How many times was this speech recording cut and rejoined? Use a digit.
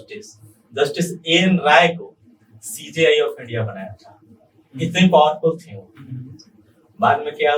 0